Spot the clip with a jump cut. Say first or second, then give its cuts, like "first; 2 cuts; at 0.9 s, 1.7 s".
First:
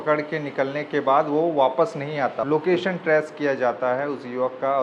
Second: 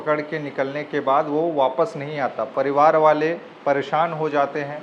first; 1 cut; at 2.4 s